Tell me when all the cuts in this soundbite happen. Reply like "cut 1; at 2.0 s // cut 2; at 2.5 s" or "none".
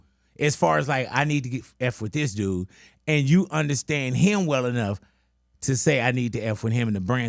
none